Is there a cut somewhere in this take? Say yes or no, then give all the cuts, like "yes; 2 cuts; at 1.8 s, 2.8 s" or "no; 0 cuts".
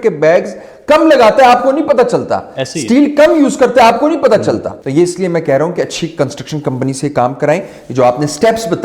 yes; 1 cut; at 4.8 s